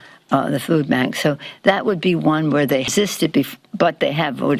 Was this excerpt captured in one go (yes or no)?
no